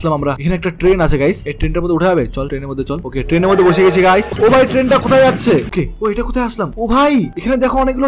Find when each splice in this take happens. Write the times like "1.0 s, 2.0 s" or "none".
4.3 s, 5.7 s